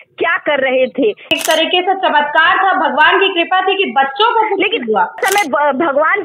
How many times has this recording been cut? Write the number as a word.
two